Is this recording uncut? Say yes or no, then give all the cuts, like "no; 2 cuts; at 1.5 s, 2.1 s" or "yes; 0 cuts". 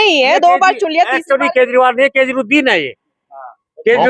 yes; 0 cuts